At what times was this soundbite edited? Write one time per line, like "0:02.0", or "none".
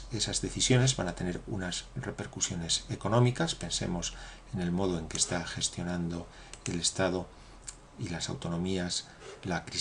0:04.4